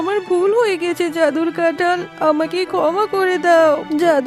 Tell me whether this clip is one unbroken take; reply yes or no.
yes